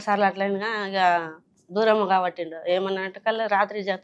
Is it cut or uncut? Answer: uncut